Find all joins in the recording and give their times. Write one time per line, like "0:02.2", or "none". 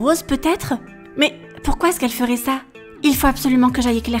none